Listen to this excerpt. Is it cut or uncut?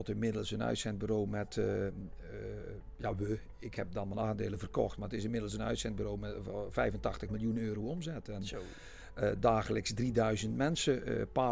uncut